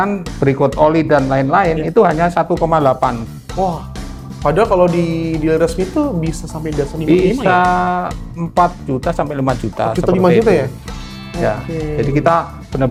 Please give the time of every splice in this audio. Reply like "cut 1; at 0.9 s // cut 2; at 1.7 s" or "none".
none